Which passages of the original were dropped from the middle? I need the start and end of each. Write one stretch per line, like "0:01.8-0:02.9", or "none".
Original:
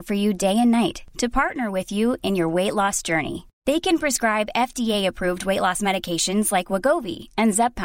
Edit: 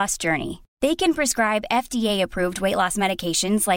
none